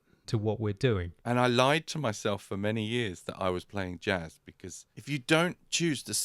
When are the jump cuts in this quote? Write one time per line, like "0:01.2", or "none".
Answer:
0:01.1
0:04.8